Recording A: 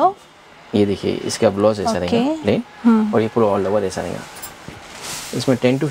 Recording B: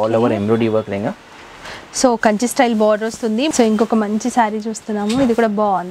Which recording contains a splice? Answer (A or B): B